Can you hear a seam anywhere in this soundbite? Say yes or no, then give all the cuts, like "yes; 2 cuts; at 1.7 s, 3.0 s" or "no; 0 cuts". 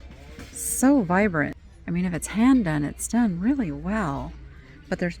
yes; 1 cut; at 1.6 s